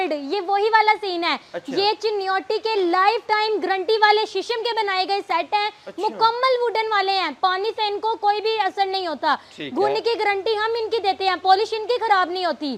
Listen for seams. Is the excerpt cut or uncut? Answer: uncut